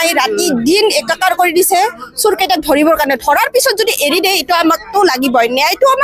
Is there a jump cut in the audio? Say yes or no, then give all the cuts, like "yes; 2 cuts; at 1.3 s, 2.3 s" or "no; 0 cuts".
no; 0 cuts